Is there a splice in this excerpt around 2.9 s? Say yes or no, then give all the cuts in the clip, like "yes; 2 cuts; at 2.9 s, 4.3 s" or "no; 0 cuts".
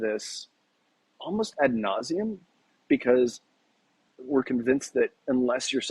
no; 1 cut; at 4.2 s